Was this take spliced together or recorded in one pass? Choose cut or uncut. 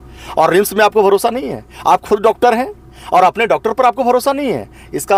uncut